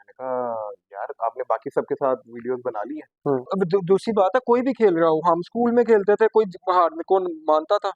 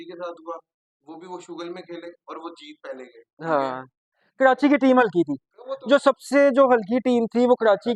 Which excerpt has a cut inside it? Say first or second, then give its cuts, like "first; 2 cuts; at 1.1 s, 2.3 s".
first; 1 cut; at 3.5 s